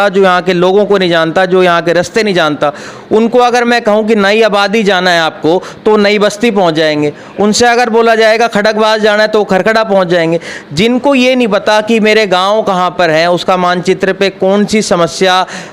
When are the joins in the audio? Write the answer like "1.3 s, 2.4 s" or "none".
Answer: none